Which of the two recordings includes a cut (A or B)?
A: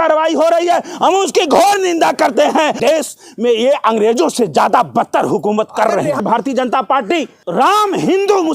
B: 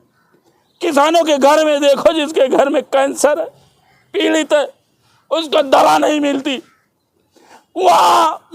A